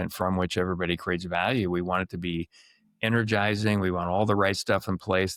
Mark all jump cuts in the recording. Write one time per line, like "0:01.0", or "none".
none